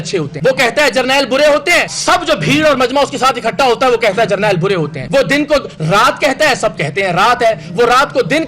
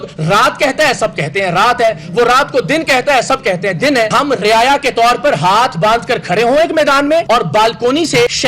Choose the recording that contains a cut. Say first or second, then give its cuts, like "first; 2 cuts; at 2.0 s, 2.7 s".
second; 1 cut; at 4.1 s